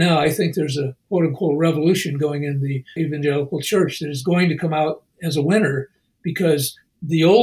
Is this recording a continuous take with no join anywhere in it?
no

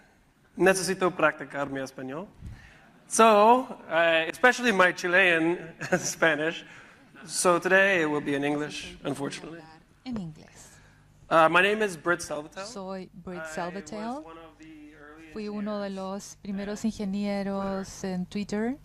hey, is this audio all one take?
yes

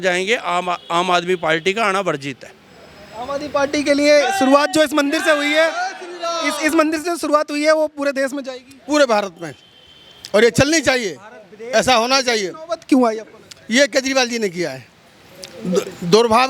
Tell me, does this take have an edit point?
no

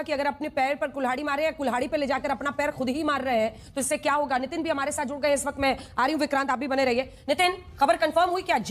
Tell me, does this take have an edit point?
no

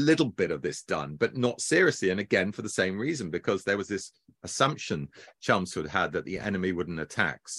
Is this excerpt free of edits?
yes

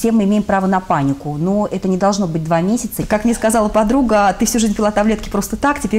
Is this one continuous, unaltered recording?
no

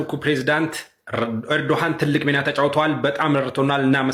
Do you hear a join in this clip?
no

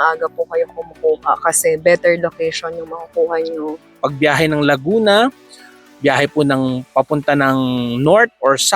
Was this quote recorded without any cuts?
no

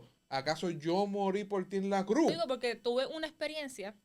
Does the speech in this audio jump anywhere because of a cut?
yes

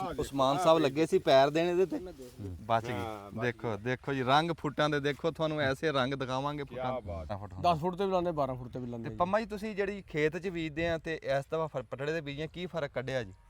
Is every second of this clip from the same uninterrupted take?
no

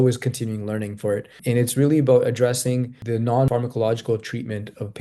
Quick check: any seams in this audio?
yes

